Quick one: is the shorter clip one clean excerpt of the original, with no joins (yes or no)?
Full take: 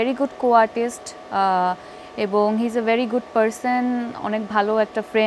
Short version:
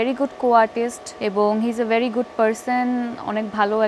no